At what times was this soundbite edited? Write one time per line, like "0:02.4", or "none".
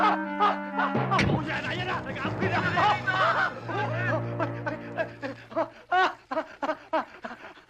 0:03.6

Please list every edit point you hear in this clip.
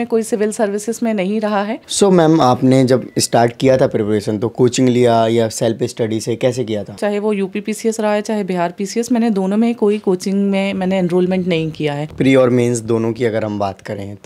0:01.8
0:07.0
0:12.1

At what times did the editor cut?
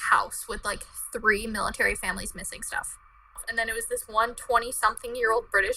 0:03.4

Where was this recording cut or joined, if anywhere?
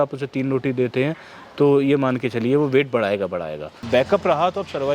0:03.7

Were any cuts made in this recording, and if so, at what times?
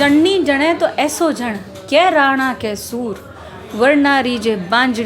none

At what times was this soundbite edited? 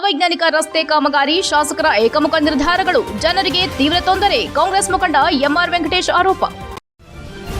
0:06.7

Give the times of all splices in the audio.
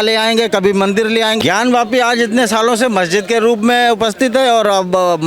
0:01.4

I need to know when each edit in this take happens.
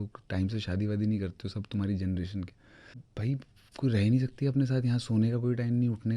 0:03.1

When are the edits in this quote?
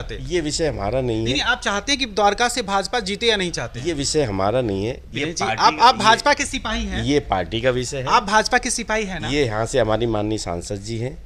none

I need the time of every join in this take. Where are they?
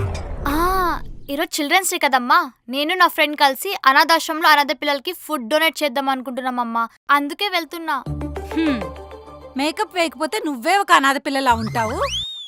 none

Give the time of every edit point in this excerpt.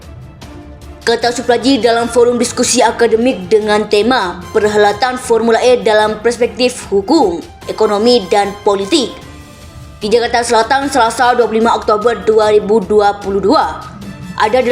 0:01.0

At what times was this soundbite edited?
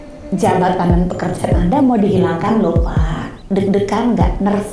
0:03.3

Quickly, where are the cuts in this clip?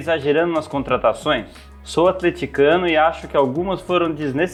none

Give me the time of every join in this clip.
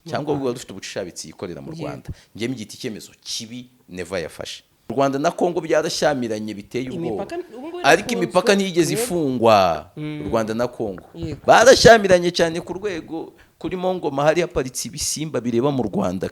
0:04.9

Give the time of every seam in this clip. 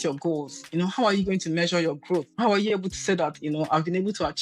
none

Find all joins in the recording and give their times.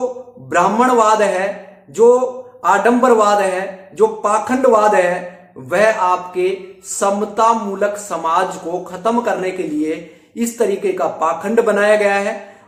none

